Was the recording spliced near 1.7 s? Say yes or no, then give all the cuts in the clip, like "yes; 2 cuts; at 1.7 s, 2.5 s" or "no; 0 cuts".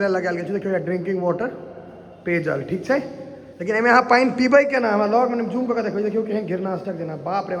no; 0 cuts